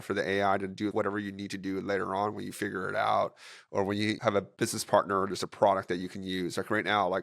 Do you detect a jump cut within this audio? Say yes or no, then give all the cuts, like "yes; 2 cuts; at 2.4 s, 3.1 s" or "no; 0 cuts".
yes; 2 cuts; at 0.9 s, 4.2 s